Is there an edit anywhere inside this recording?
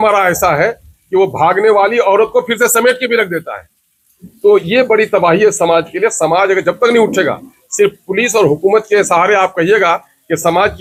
no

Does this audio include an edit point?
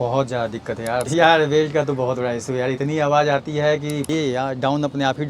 yes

